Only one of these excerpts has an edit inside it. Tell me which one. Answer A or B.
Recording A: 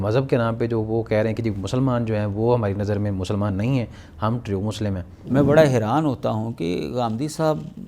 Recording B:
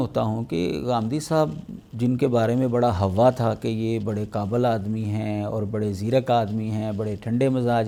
A